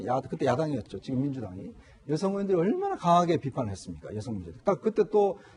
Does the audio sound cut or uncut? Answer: uncut